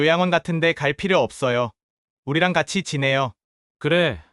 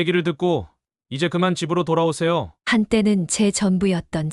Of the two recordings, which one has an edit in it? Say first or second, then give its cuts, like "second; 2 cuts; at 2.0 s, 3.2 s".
second; 1 cut; at 2.6 s